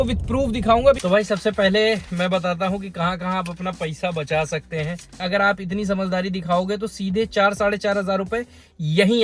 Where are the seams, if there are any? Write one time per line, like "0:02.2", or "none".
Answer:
0:01.0
0:05.2